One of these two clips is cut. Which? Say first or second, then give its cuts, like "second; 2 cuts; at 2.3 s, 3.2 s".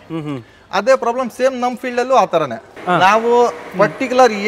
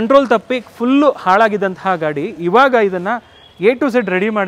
first; 1 cut; at 2.8 s